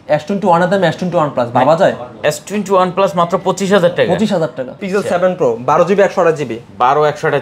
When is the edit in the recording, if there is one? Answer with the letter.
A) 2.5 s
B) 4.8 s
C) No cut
B